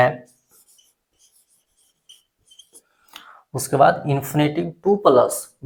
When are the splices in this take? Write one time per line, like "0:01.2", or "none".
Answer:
none